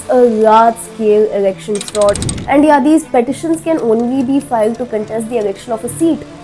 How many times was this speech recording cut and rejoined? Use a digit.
1